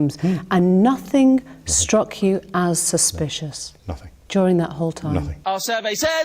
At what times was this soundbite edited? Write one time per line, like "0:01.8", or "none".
0:05.3